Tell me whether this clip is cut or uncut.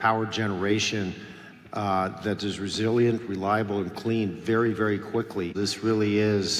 cut